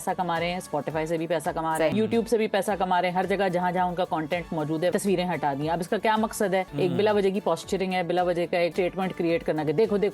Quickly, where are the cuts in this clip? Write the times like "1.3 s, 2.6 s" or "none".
1.9 s, 4.9 s, 6.7 s, 8.7 s